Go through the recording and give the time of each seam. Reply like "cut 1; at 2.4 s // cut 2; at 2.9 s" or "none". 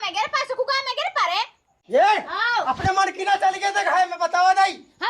cut 1; at 1.7 s